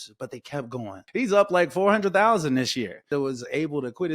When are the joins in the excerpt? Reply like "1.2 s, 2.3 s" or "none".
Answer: 1.0 s, 3.1 s